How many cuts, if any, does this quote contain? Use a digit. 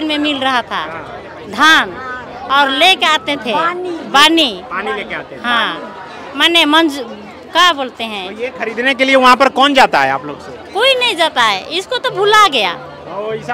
0